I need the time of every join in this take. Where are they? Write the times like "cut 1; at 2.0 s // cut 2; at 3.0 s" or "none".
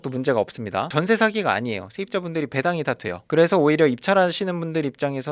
cut 1; at 0.9 s